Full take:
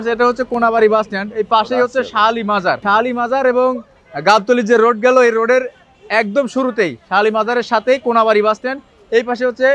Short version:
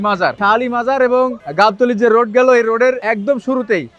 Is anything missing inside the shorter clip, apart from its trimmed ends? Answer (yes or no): yes